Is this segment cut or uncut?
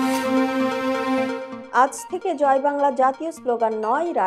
cut